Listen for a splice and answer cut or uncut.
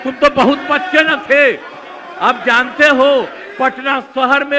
uncut